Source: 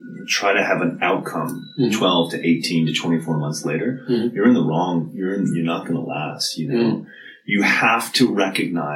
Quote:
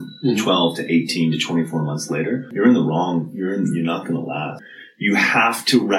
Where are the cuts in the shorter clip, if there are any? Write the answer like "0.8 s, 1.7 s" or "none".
2.5 s, 4.7 s